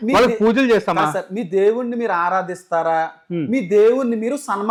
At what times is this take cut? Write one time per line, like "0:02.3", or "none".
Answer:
none

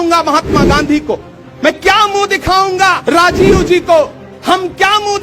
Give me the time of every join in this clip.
0:03.0

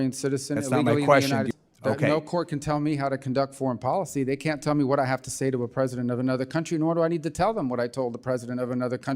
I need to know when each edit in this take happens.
0:01.5

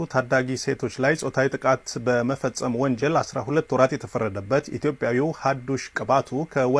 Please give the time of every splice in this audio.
none

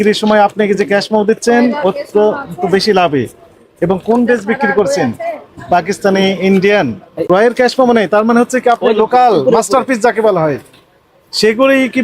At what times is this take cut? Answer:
0:07.2

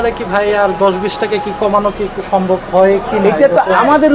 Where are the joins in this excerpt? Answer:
none

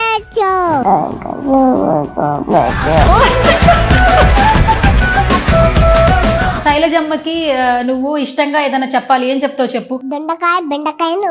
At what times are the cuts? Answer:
0:06.6

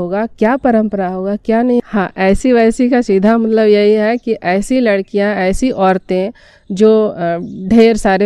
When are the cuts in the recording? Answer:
0:01.8

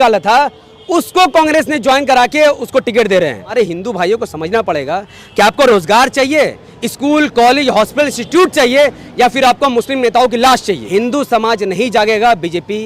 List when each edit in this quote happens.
0:03.5
0:10.8

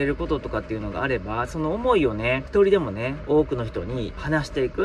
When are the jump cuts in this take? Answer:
0:02.4

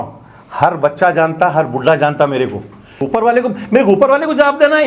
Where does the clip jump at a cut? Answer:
0:03.0

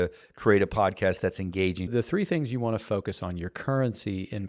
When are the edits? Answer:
0:01.9

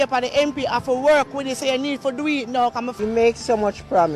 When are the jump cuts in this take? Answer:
0:02.9

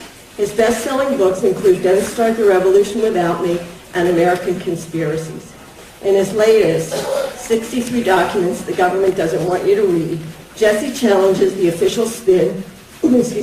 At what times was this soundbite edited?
0:11.0

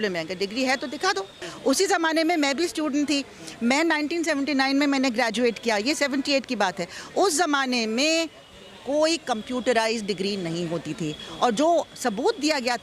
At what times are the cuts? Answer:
0:01.4

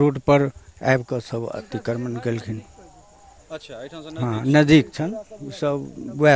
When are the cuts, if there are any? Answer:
none

